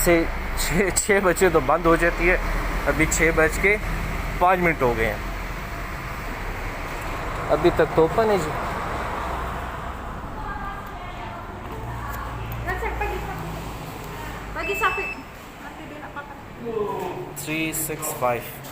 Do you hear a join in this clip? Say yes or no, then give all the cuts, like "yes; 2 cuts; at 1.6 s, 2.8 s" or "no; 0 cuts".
no; 0 cuts